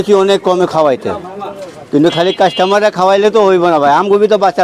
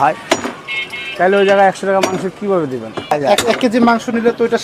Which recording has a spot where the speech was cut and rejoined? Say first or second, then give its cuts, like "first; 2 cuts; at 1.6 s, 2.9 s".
second; 1 cut; at 3.1 s